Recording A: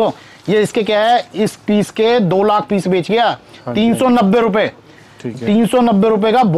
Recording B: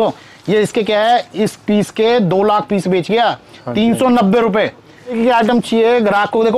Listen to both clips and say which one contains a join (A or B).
B